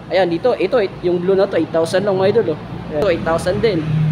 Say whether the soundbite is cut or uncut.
cut